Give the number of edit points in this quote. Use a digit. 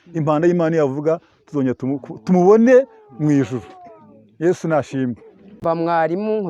1